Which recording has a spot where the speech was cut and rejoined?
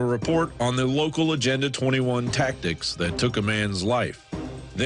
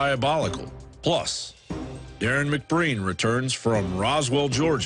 second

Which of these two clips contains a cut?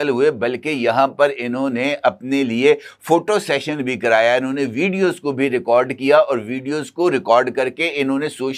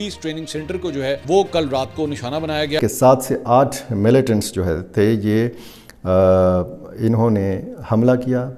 second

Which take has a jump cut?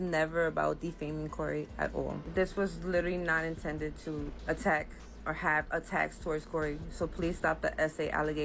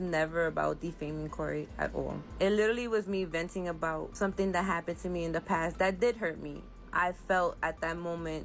first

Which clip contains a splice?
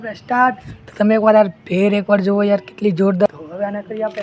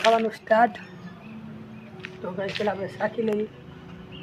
first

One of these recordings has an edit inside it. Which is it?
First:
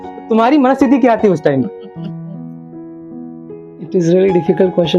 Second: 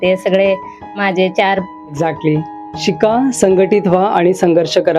second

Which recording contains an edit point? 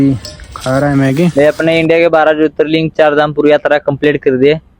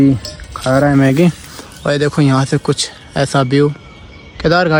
first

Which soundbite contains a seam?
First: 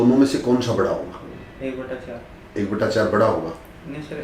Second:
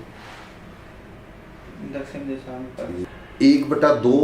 second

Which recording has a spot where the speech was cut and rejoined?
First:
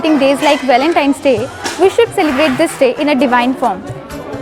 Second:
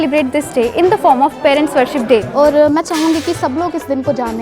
second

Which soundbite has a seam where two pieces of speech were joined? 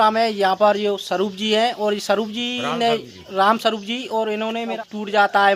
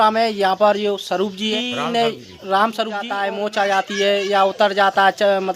second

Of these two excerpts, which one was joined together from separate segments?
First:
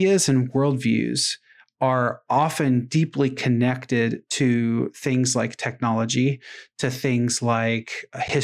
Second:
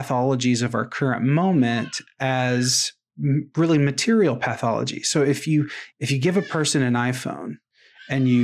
second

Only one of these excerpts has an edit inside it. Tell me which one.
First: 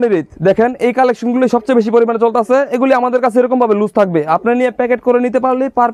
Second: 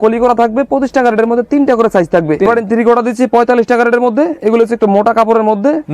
second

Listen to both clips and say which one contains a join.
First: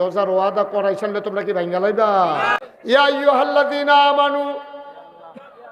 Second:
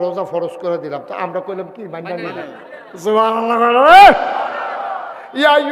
first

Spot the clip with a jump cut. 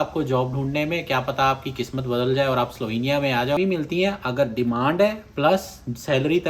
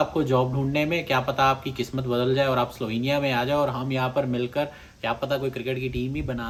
first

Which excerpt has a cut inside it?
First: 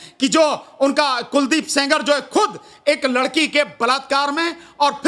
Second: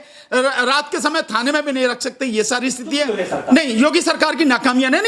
second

